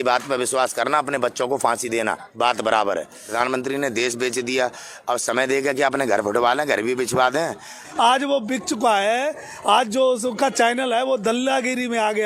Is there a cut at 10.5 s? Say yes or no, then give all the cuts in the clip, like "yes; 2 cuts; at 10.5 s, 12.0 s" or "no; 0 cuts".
no; 2 cuts; at 3.2 s, 7.8 s